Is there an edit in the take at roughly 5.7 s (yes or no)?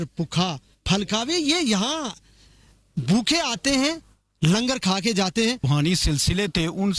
yes